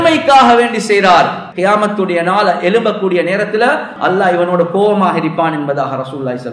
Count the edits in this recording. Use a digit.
2